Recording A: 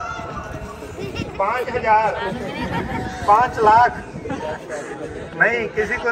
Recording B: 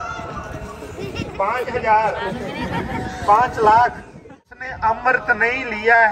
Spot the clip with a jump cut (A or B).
B